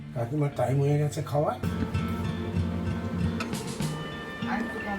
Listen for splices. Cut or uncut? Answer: cut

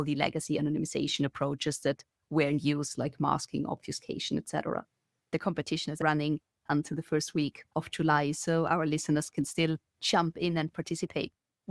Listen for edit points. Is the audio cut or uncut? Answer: cut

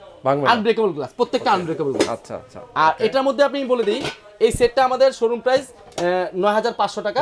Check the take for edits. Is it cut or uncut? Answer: uncut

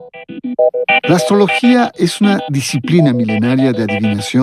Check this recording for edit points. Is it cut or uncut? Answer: cut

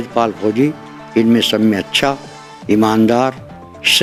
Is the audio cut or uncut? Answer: uncut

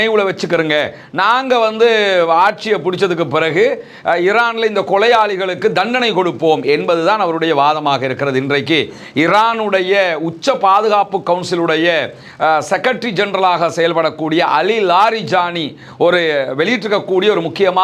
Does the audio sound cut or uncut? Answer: uncut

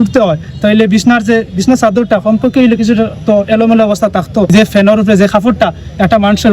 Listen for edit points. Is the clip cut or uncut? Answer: cut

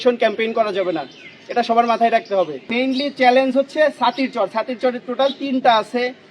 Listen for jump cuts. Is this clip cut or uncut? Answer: cut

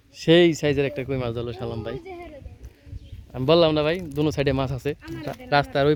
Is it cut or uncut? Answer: uncut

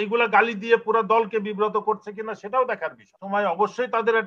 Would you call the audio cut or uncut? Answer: cut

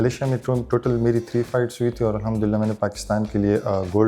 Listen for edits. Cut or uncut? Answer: uncut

